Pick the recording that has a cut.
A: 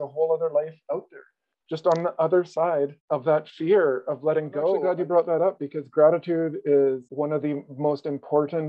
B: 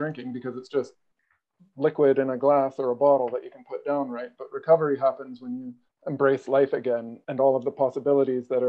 A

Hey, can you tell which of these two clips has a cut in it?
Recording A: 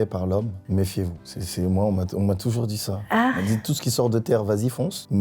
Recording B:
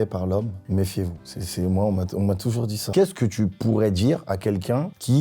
B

